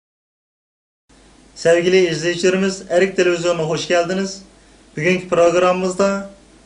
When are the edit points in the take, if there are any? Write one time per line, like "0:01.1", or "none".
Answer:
none